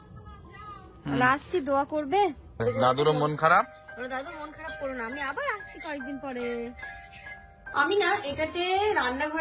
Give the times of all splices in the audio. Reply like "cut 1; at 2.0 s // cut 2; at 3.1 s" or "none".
cut 1; at 2.6 s // cut 2; at 7.7 s

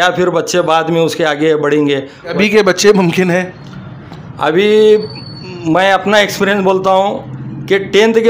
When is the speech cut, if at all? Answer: cut 1; at 2.3 s

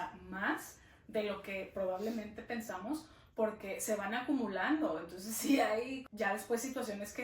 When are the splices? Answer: cut 1; at 6.0 s

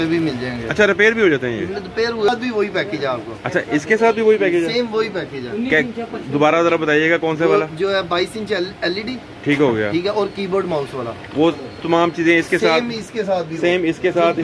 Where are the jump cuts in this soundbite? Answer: cut 1; at 2.3 s

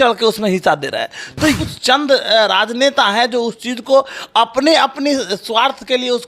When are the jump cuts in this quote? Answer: cut 1; at 1.6 s

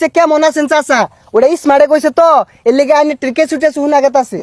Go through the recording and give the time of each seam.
none

